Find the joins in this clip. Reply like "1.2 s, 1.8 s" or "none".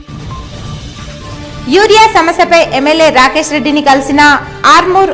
none